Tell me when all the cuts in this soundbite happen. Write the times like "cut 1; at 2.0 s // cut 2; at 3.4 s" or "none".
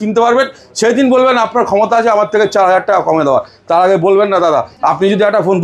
cut 1; at 4.7 s